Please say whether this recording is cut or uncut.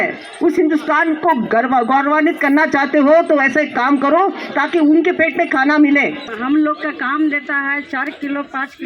cut